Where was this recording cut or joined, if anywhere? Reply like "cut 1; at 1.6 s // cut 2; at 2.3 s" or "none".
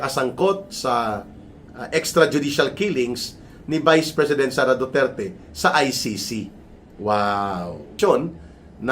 cut 1; at 7.9 s